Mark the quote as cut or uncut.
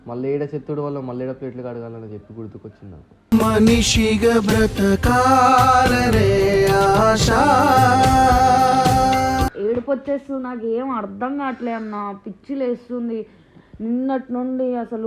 cut